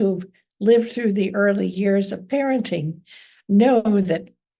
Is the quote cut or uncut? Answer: uncut